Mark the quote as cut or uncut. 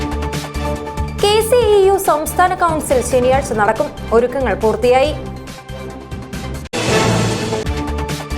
cut